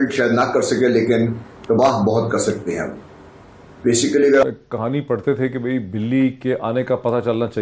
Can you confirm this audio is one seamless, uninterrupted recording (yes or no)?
no